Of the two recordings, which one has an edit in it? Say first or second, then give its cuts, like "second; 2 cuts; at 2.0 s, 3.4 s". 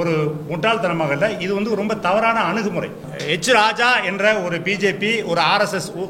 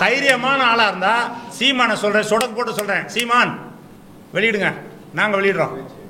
first; 1 cut; at 3.1 s